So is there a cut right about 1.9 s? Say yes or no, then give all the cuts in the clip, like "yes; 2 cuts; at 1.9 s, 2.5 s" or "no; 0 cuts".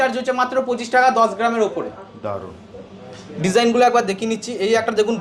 no; 0 cuts